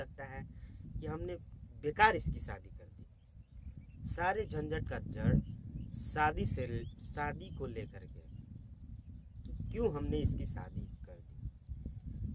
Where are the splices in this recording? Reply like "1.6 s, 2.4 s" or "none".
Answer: none